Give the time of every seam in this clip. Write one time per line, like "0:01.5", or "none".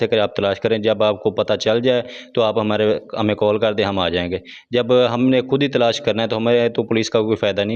none